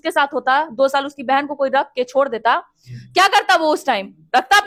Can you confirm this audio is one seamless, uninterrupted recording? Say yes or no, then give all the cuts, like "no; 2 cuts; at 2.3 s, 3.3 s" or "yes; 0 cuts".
yes; 0 cuts